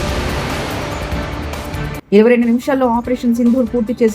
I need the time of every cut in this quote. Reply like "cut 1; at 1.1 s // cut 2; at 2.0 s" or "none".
cut 1; at 1.8 s